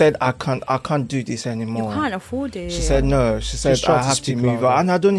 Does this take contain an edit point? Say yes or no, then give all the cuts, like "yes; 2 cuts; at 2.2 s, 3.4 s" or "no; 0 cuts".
no; 0 cuts